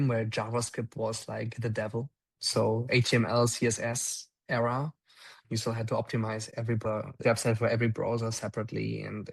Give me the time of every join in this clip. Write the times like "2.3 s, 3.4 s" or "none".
6.7 s